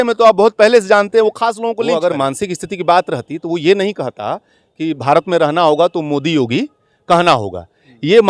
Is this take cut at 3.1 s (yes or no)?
no